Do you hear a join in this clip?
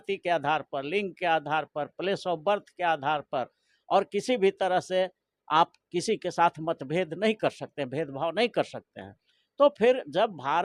no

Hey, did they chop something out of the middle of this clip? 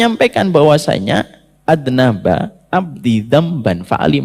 no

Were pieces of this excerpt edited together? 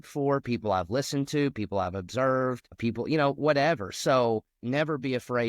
yes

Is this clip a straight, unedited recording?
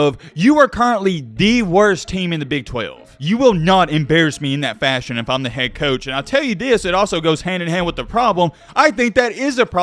no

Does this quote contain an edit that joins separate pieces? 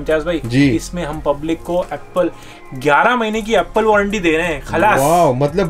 no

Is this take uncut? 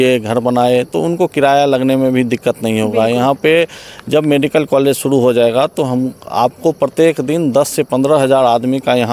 yes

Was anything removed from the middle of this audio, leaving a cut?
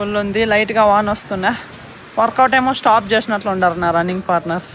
no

